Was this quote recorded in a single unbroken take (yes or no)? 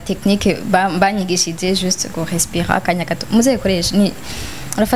yes